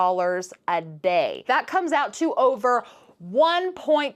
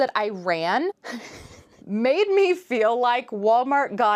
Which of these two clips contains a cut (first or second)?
first